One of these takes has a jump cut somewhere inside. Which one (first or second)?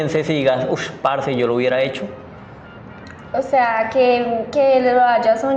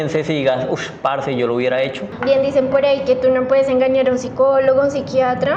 second